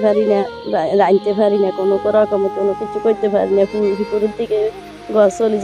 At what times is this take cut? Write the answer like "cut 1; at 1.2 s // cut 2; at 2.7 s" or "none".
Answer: none